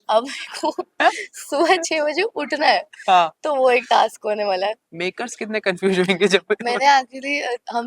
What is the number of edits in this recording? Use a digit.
1